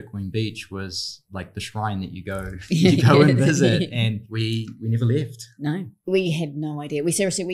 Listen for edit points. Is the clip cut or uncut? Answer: cut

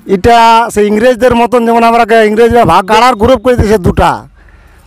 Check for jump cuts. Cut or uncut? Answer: cut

